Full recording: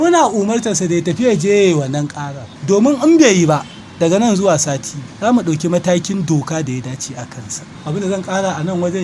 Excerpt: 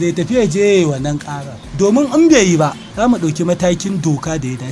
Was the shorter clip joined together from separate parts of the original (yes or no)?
yes